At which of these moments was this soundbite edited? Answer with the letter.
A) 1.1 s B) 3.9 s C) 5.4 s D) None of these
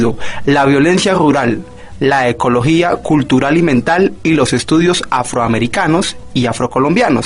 B